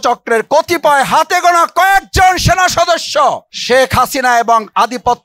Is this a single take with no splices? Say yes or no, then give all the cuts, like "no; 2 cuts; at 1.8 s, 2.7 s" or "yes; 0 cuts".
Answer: no; 1 cut; at 3.5 s